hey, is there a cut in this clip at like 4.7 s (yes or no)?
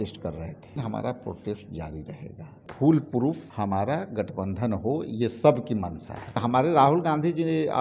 no